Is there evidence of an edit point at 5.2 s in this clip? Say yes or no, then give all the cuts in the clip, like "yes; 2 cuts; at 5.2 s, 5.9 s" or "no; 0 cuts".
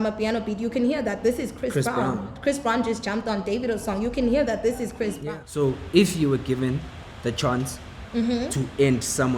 yes; 1 cut; at 5.2 s